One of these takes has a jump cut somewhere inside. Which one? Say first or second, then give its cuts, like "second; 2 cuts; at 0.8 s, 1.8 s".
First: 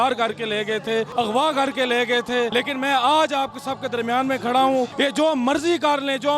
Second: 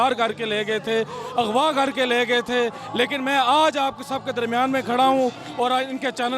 first; 3 cuts; at 1.1 s, 2.5 s, 4.9 s